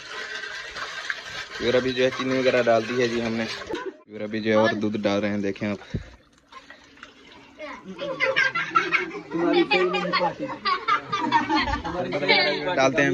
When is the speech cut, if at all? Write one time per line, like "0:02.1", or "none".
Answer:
0:03.8